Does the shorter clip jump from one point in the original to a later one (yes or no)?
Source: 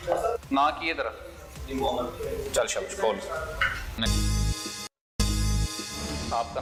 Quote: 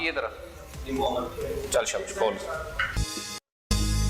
yes